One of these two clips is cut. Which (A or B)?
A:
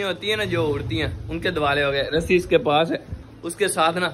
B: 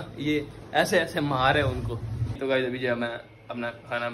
B